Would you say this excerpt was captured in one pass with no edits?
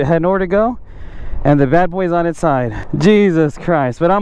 no; 1 cut; at 2.8 s

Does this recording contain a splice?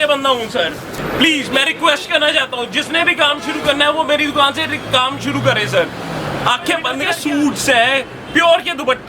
yes; 2 cuts; at 1.0 s, 7.1 s

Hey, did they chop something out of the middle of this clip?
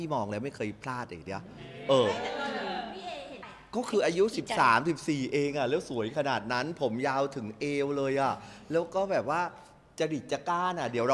yes; 1 cut; at 3.5 s

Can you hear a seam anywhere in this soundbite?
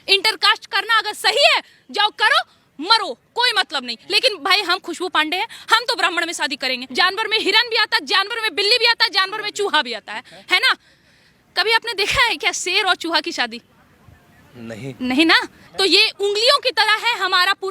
yes; 2 cuts; at 6.8 s, 15.6 s

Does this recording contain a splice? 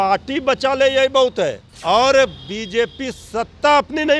yes; 1 cut; at 1.7 s

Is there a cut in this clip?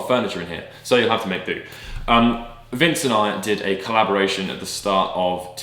no; 0 cuts

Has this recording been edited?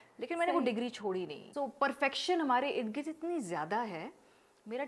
yes; 1 cut; at 1.4 s

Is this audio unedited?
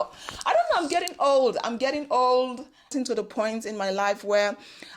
no; 1 cut; at 2.9 s

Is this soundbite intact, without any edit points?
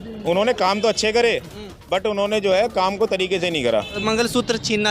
no; 1 cut; at 4.0 s

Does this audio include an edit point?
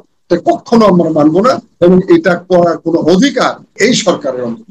yes; 1 cut; at 3.8 s

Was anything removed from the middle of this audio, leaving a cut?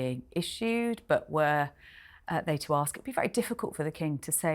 no; 0 cuts

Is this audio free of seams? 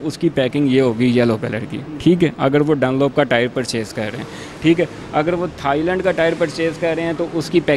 yes; 0 cuts

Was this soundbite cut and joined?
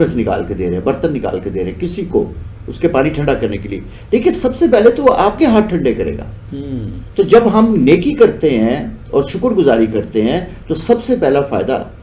no; 0 cuts

